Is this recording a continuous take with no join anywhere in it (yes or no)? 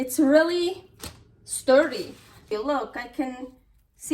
no